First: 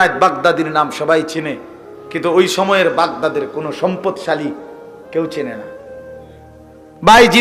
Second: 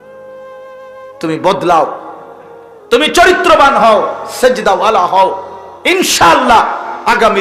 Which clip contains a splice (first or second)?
second